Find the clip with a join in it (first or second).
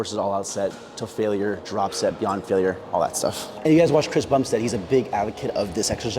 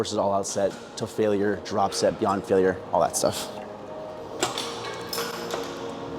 first